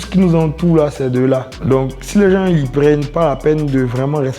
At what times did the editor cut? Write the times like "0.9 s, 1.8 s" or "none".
1.5 s